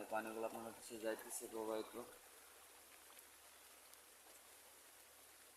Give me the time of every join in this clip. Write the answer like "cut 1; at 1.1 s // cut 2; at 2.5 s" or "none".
none